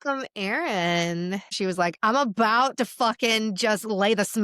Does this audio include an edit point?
yes; 1 cut; at 1.6 s

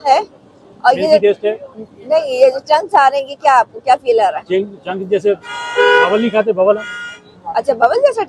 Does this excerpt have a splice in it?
no; 0 cuts

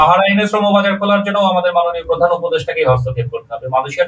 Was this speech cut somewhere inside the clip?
no; 0 cuts

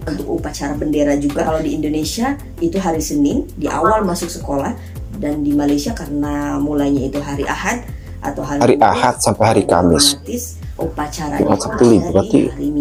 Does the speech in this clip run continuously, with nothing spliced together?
yes; 0 cuts

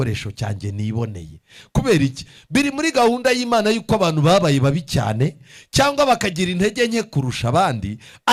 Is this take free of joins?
yes; 0 cuts

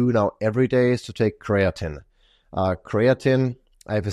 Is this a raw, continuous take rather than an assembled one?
yes; 0 cuts

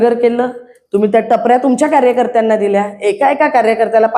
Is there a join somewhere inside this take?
no; 0 cuts

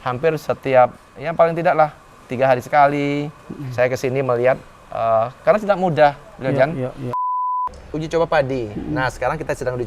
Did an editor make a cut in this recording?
yes; 1 cut; at 7.4 s

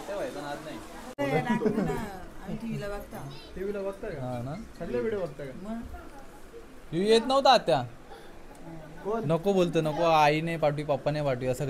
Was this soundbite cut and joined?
yes; 1 cut; at 1.2 s

